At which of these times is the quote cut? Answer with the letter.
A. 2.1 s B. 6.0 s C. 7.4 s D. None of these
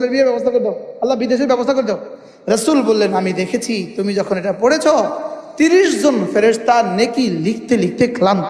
A